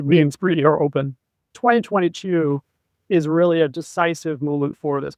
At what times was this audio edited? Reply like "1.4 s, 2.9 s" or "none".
1.5 s